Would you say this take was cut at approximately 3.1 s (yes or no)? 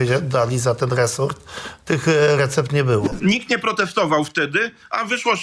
yes